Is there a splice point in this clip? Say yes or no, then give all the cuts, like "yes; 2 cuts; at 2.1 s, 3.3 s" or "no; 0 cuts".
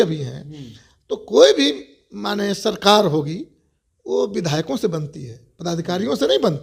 no; 0 cuts